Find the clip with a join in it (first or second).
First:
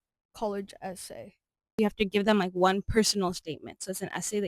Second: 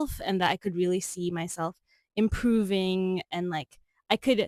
first